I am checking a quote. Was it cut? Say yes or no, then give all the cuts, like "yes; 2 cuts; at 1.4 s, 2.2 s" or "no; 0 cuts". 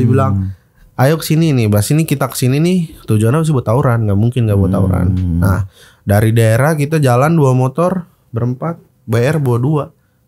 no; 0 cuts